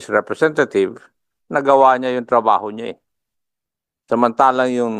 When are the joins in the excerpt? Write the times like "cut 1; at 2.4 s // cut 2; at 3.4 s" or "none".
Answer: none

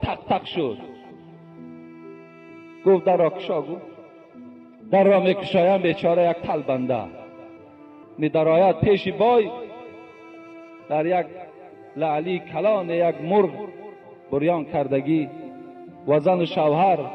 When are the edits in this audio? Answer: cut 1; at 1.0 s // cut 2; at 2.6 s

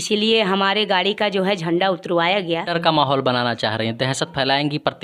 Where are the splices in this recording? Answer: cut 1; at 2.7 s

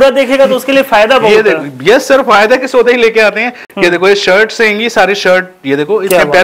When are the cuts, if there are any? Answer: none

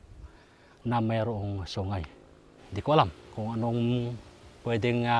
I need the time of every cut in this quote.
cut 1; at 2.0 s

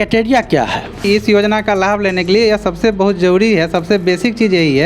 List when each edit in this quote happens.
cut 1; at 1.0 s

